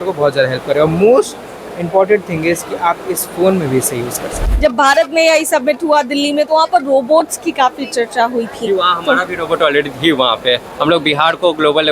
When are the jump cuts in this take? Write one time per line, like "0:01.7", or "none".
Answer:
0:04.4